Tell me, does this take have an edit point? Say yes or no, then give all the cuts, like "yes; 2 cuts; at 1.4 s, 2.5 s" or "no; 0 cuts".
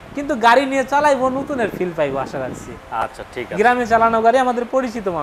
no; 0 cuts